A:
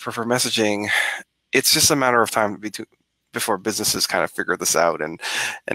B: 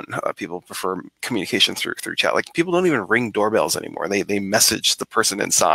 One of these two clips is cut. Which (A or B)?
B